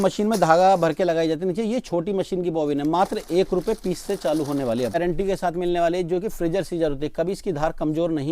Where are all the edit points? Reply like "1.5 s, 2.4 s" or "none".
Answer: 5.0 s